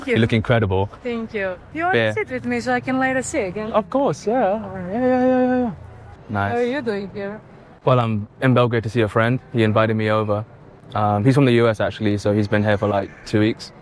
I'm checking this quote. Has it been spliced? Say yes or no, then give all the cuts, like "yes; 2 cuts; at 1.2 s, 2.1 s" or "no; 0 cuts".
yes; 2 cuts; at 1.7 s, 6.2 s